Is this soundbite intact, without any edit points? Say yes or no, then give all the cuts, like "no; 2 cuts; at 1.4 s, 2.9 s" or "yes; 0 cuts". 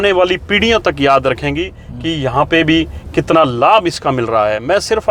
yes; 0 cuts